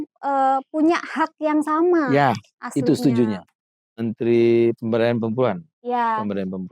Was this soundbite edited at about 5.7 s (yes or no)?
no